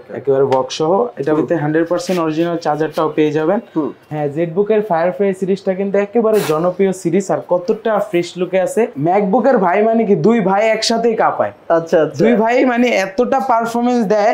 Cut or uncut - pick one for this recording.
cut